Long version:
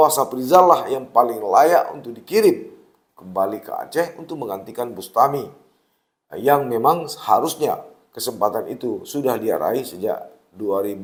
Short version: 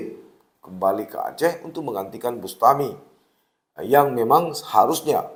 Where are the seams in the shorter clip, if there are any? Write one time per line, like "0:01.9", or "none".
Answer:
none

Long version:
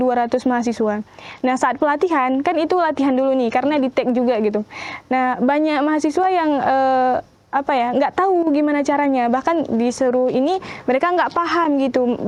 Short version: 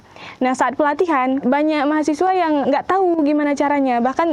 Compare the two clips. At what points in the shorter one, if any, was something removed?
0:01.4
0:02.6

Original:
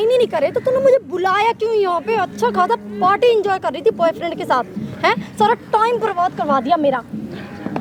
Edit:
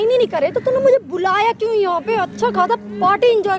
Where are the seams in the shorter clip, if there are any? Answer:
none

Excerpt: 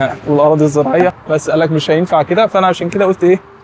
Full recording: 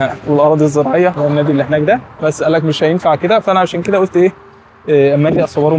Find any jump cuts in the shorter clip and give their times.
0:01.2

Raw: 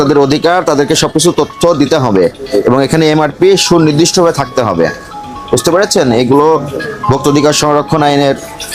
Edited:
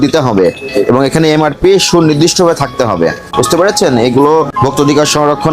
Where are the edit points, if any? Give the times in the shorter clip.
0:03.2
0:04.5

